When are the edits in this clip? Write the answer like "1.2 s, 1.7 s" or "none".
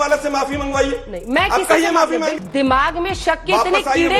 2.4 s

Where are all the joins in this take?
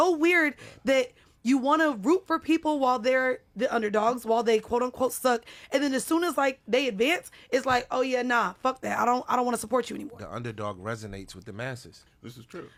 none

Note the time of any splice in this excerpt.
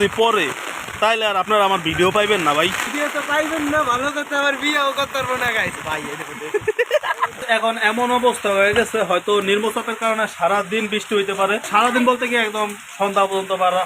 2.8 s, 7.4 s, 11.7 s

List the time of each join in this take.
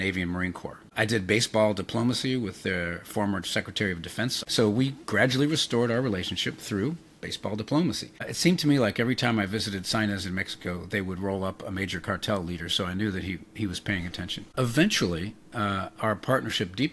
0.9 s, 4.4 s, 8.3 s, 14.5 s

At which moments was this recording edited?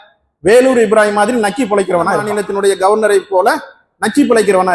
2.3 s

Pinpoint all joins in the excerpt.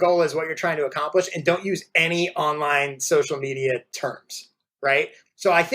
4.8 s

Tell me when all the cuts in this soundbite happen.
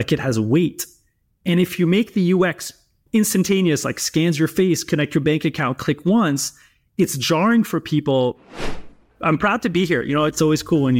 8.5 s

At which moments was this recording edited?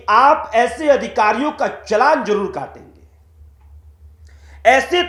none

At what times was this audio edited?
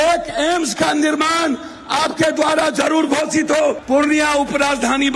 3.8 s

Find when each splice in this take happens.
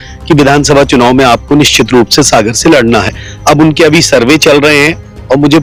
none

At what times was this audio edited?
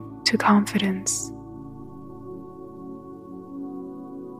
1.0 s

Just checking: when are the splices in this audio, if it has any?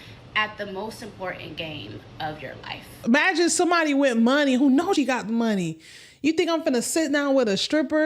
2.9 s

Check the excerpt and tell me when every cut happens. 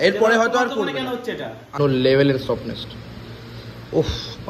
1.7 s

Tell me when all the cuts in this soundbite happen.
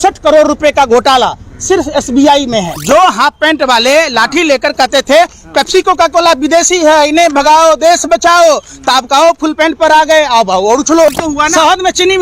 2.7 s, 11.2 s

